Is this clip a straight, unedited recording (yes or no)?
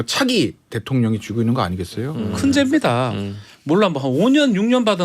no